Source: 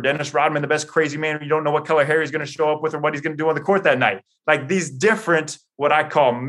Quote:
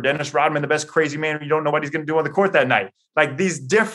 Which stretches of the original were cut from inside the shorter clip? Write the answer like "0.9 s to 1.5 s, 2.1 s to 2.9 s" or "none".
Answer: 1.7 s to 3.0 s

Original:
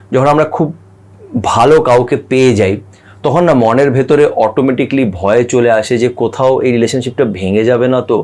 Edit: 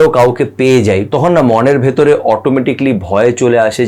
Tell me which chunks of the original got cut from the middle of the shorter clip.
2.8 s to 3.2 s

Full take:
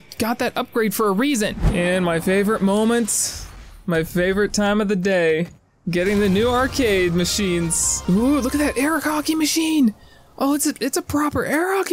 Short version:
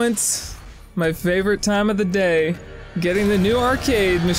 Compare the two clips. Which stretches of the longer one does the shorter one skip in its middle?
none

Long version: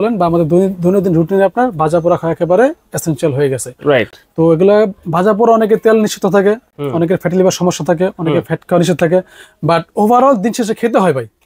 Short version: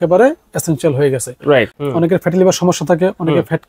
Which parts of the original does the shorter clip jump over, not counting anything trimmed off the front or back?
4.2 s to 6.8 s

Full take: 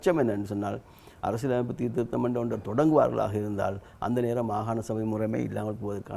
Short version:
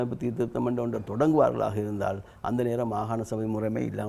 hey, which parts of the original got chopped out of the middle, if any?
none

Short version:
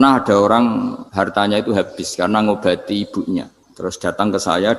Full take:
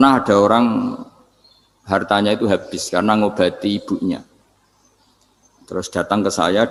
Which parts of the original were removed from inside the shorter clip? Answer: 1.0 s to 1.8 s, 4.4 s to 5.5 s

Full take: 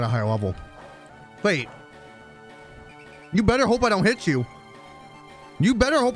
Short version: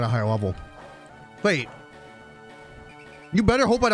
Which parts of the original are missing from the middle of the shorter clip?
none

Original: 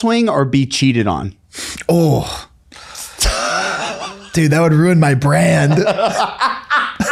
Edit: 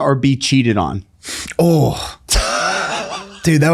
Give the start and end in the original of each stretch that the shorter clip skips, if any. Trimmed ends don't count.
2.5 s to 3.1 s

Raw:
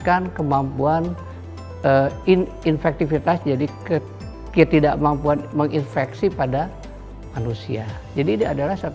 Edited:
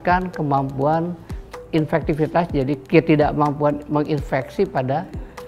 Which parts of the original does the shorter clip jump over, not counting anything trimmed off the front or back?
1.6 s to 2.5 s, 3.7 s to 4.5 s

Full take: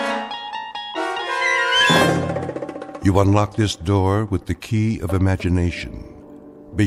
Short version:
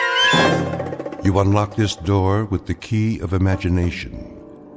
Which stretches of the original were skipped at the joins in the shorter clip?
2.6 s to 2.9 s

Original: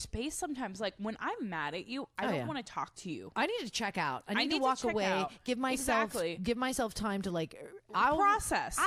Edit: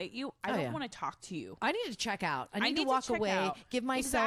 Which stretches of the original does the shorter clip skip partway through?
none

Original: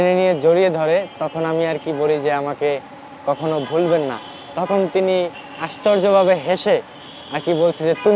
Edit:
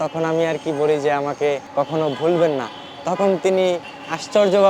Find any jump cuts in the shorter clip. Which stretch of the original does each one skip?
2.8 s to 3.1 s

